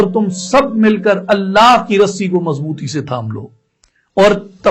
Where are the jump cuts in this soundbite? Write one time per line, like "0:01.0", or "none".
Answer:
none